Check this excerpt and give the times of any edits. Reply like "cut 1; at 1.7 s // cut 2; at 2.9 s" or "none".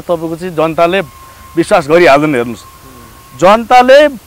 none